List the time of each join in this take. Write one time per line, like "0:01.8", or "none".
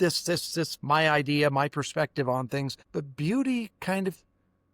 0:02.8

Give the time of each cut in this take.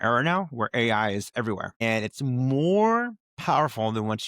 0:01.8
0:03.3

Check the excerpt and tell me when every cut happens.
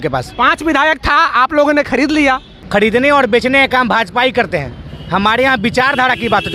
0:02.5

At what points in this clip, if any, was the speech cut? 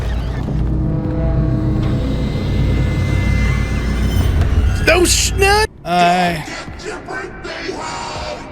0:05.7

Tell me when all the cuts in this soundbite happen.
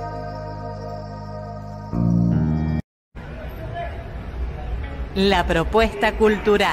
0:02.8

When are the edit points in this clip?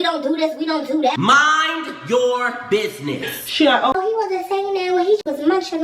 0:03.4

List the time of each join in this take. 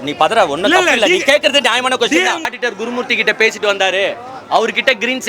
0:02.5

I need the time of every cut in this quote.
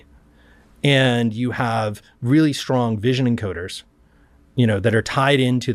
none

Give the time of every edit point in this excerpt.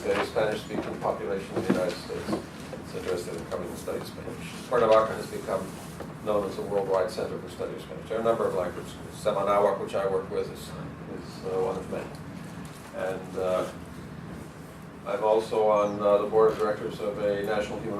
0:15.9

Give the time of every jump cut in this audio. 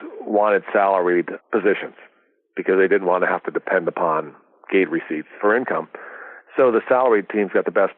0:01.3
0:05.3

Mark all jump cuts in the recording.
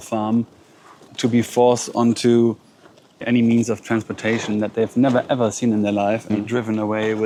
none

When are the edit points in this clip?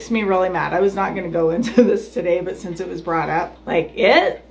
0:03.6

